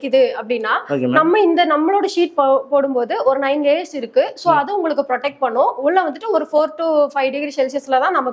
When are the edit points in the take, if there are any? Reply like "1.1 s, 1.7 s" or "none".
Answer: none